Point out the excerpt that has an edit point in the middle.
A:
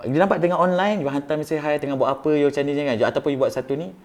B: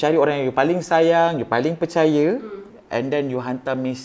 B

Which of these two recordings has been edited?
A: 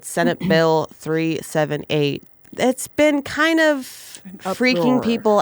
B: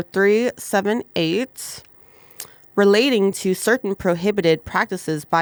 A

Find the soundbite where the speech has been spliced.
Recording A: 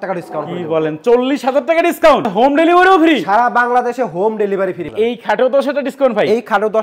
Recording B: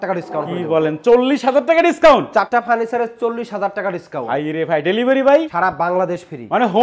A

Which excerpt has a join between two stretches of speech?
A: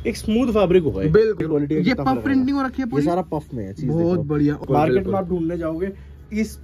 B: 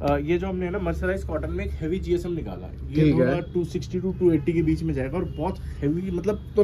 A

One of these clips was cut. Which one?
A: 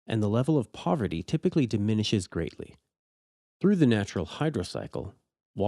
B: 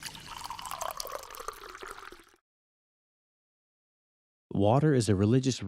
A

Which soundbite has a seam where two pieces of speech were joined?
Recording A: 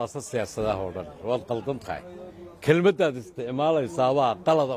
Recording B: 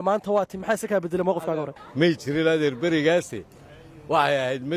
B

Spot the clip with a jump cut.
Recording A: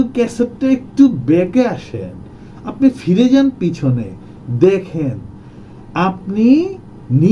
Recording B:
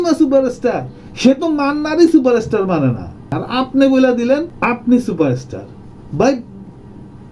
B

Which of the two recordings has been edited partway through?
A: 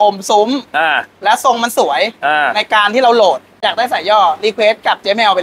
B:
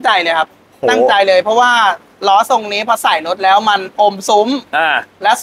A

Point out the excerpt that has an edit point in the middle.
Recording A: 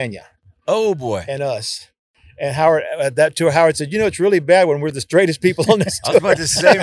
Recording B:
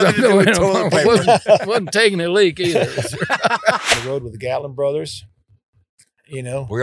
B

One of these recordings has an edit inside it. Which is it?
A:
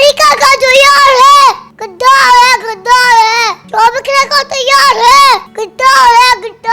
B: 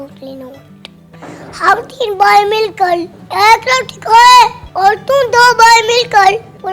B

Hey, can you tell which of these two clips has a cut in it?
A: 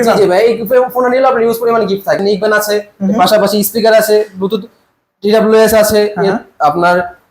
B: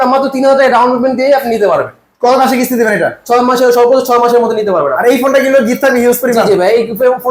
A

